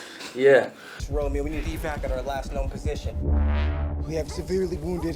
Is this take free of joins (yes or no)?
yes